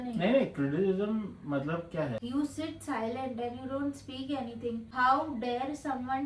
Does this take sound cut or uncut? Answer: cut